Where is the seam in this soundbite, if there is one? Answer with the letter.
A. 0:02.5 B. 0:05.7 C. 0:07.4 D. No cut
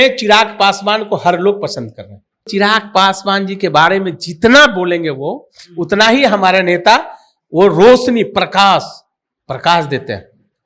A